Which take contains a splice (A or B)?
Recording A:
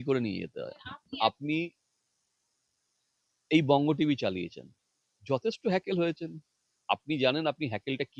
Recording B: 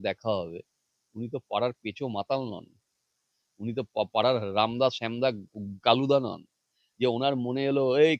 A